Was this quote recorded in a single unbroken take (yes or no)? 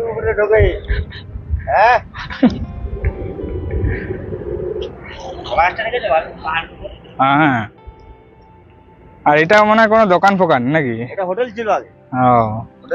yes